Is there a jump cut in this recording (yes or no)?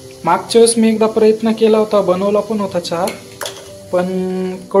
no